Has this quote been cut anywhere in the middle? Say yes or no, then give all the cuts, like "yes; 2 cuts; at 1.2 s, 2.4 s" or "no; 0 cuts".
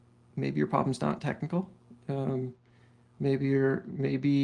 no; 0 cuts